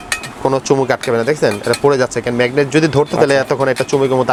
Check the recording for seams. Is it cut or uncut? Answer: uncut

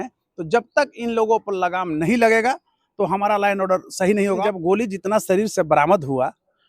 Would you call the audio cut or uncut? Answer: cut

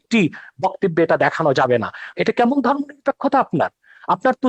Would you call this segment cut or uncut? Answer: cut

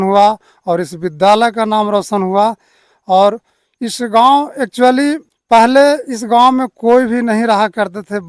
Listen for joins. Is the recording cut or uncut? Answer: uncut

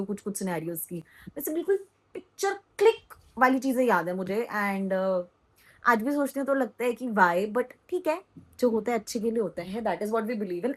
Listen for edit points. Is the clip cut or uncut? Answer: uncut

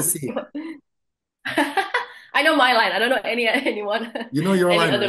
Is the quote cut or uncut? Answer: uncut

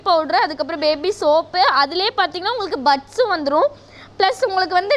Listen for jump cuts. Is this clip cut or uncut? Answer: uncut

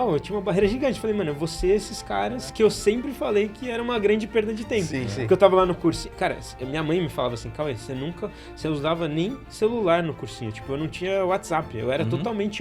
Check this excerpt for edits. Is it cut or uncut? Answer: uncut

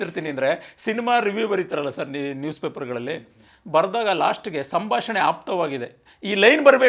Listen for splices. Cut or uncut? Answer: uncut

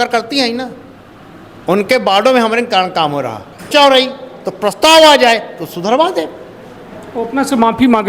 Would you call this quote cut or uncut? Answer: cut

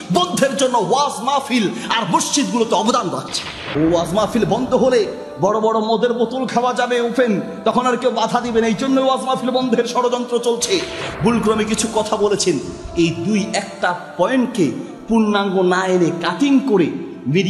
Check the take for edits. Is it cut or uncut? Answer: cut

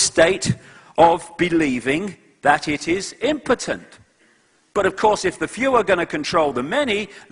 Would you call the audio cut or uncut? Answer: cut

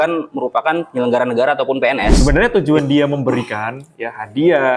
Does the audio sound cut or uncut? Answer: cut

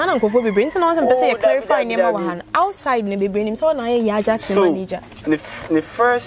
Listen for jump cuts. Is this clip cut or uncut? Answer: uncut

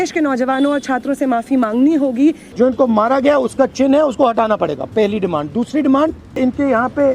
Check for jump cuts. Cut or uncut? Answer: cut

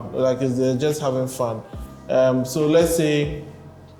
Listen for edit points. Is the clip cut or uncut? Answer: uncut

